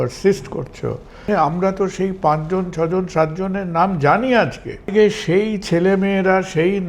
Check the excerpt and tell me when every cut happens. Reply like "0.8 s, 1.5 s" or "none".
1.2 s, 4.9 s